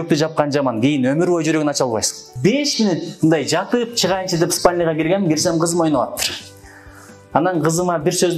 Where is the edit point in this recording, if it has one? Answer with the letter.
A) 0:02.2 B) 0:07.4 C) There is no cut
A